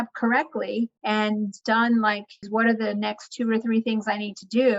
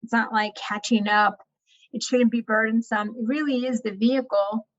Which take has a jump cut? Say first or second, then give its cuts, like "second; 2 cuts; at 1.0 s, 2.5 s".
first; 2 cuts; at 1.2 s, 2.4 s